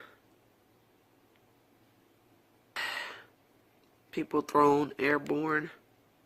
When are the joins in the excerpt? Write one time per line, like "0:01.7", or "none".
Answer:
0:02.8